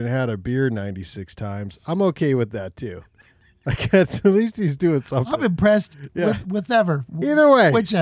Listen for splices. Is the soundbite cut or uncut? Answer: uncut